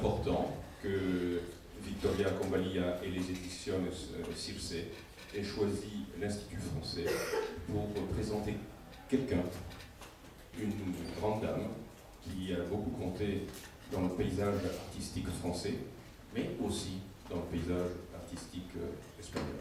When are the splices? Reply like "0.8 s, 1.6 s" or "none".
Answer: none